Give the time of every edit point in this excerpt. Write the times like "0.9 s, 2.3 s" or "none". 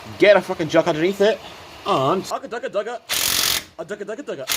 2.3 s